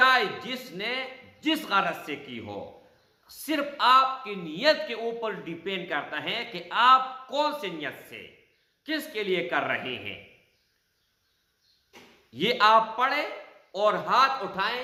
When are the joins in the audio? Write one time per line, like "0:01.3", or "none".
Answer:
none